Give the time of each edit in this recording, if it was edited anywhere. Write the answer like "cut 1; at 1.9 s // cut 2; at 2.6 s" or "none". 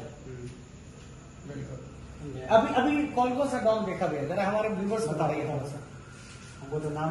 none